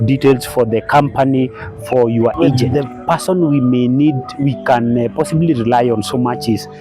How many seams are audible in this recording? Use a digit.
1